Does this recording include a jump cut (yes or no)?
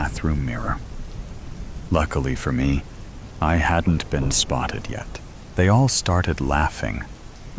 yes